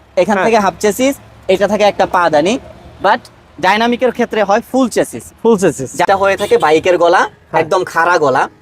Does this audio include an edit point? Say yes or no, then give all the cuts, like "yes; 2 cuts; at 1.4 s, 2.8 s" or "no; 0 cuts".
yes; 1 cut; at 6.1 s